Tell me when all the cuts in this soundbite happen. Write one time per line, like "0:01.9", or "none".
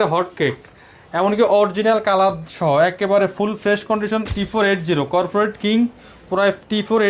0:04.3